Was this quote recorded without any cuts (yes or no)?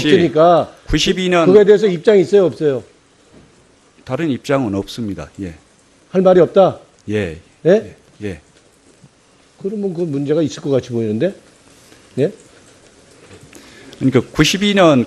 no